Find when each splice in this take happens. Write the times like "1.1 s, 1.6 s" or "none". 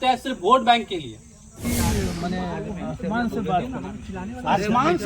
1.6 s